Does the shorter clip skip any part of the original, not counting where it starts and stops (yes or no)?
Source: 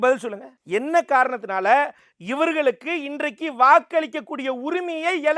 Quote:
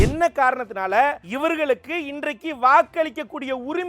yes